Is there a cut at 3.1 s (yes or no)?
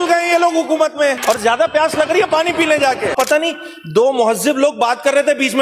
yes